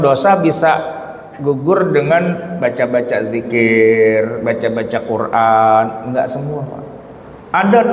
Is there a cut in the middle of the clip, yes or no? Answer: no